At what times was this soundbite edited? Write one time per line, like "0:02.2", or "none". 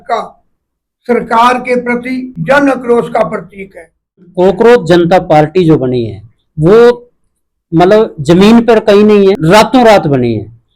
0:02.3
0:04.3
0:09.4